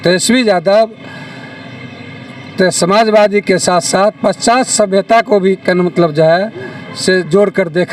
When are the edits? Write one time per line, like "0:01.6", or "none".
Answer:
none